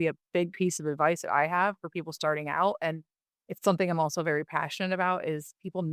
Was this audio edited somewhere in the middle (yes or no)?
no